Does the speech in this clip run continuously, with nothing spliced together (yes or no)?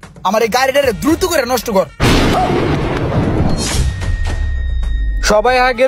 yes